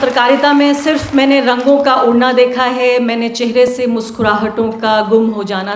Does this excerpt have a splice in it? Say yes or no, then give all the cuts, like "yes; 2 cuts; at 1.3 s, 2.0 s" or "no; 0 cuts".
no; 0 cuts